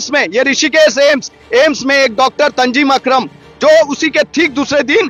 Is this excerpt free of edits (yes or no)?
yes